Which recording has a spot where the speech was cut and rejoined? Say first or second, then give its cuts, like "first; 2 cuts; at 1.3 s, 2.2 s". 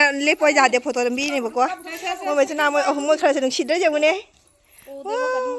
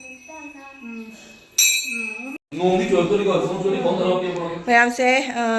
second; 1 cut; at 2.4 s